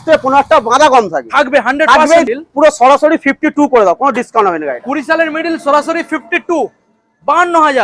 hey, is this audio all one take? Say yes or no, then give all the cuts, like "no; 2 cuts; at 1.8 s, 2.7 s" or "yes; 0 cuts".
no; 1 cut; at 2.2 s